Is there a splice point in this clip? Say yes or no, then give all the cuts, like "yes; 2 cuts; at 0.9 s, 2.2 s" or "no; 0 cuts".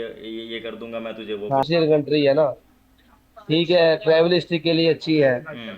yes; 1 cut; at 1.6 s